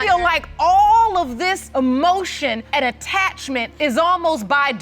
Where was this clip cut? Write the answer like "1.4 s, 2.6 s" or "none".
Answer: 1.6 s, 2.6 s, 3.7 s

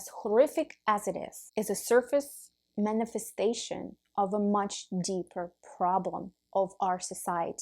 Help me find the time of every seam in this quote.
1.3 s

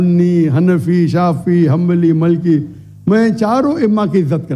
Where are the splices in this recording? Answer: none

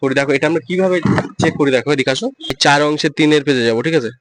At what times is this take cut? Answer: 2.5 s

